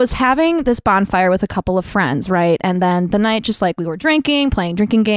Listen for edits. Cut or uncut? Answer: uncut